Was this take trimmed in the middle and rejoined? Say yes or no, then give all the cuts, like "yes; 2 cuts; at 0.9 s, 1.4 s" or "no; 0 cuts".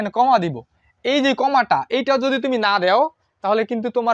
no; 0 cuts